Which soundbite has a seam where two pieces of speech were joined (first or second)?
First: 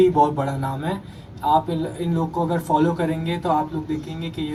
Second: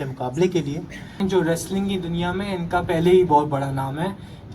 second